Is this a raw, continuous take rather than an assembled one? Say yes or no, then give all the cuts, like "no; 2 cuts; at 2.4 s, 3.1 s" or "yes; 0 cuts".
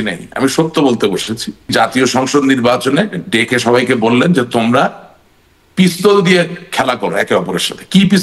no; 1 cut; at 1.7 s